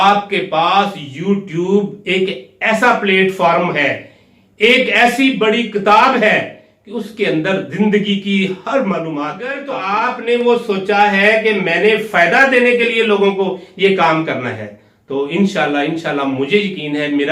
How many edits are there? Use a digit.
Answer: 1